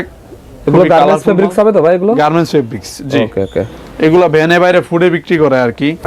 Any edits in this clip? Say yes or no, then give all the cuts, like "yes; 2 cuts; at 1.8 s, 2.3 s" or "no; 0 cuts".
no; 0 cuts